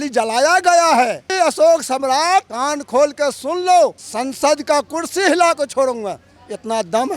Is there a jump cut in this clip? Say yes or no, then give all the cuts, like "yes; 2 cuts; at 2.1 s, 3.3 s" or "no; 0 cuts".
yes; 2 cuts; at 1.3 s, 4.0 s